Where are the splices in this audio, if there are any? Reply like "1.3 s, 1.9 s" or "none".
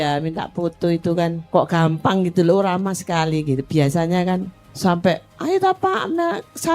1.4 s, 4.6 s, 5.3 s